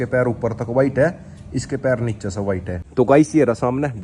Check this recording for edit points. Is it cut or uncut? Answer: cut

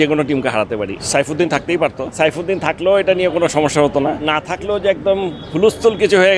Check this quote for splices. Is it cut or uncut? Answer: cut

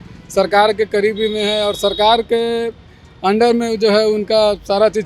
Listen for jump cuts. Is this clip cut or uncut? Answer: uncut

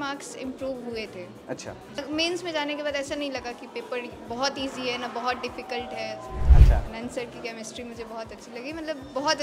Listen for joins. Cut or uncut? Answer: cut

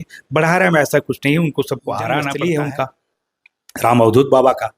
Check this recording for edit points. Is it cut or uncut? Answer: cut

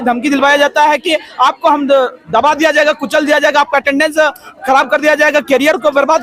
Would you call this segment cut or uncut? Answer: uncut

